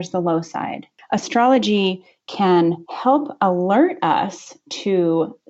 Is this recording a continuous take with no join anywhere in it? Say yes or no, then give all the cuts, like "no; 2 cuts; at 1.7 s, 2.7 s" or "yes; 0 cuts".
no; 1 cut; at 0.9 s